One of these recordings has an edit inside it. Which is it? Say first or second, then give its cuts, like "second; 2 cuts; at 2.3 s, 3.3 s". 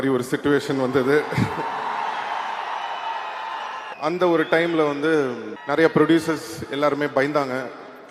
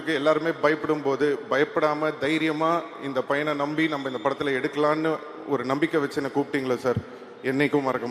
first; 2 cuts; at 3.9 s, 5.5 s